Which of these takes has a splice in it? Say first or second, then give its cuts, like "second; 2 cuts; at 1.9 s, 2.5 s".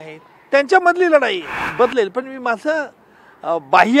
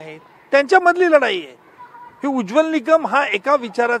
first; 1 cut; at 1.6 s